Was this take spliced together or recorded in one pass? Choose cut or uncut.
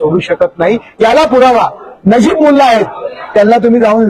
uncut